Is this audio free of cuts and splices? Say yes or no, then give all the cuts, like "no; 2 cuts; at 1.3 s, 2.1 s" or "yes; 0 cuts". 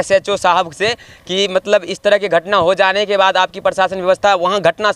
yes; 0 cuts